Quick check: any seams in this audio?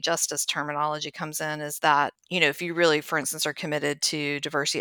yes; 1 cut; at 2.2 s

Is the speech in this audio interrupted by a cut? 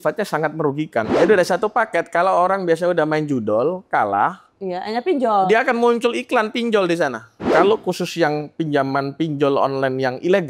yes; 2 cuts; at 1.1 s, 7.4 s

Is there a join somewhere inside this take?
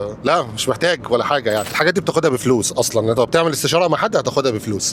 yes; 1 cut; at 1.7 s

